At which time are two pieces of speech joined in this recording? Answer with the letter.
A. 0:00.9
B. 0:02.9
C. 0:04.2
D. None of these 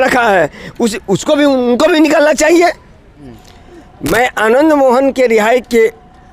B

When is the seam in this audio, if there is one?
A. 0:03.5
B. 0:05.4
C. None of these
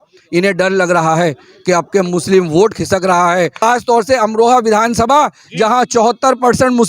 A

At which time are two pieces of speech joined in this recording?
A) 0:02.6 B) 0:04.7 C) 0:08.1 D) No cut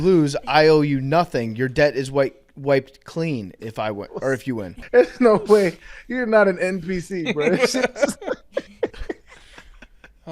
B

